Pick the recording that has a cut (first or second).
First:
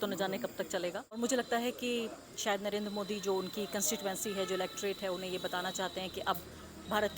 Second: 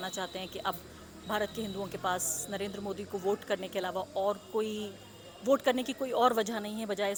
first